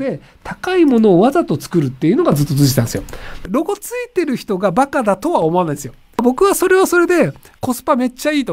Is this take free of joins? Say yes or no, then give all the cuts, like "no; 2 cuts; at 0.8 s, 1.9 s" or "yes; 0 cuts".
no; 2 cuts; at 3.5 s, 6.2 s